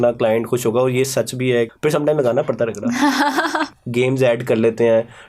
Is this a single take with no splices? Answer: no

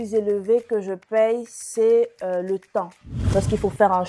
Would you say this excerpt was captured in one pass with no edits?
no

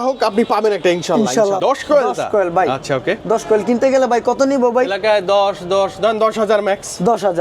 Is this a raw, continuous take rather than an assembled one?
no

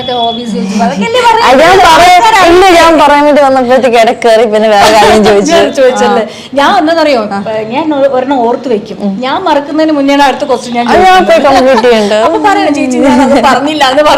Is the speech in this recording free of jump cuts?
yes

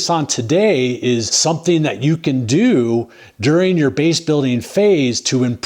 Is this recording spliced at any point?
yes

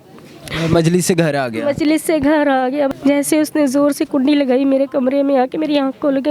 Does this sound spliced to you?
yes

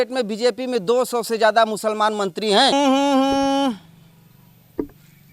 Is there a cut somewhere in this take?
yes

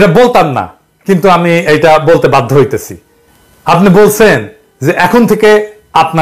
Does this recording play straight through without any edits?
yes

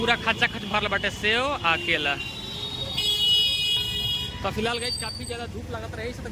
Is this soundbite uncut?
yes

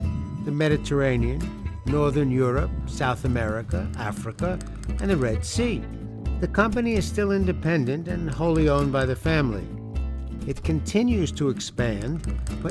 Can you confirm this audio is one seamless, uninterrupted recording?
no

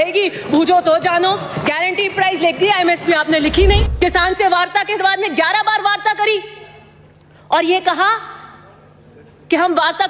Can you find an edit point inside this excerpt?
yes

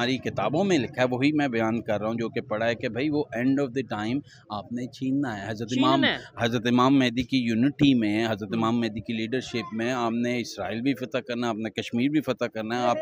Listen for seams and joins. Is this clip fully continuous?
yes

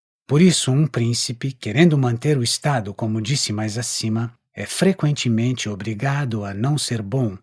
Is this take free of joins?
yes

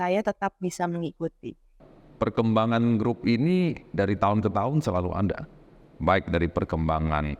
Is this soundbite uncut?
no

